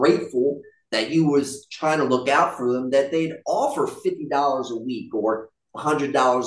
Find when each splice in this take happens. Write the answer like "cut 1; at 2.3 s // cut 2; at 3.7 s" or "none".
none